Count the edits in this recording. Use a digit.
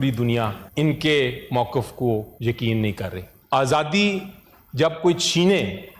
1